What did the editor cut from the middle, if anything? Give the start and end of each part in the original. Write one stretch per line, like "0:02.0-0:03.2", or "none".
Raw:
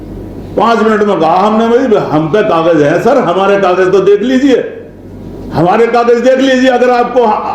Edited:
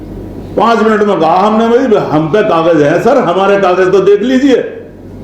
none